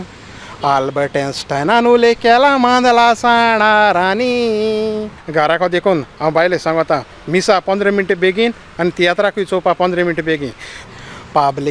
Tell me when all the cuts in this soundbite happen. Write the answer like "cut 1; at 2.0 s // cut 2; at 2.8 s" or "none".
cut 1; at 5.2 s // cut 2; at 10.8 s